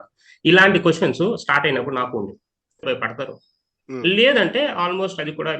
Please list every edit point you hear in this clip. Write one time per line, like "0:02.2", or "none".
0:02.8